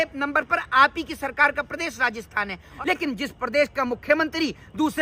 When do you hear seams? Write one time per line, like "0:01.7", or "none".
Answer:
0:02.7